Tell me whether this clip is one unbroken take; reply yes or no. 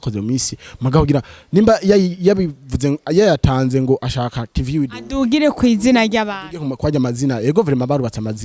yes